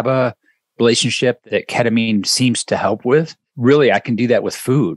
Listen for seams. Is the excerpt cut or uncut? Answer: cut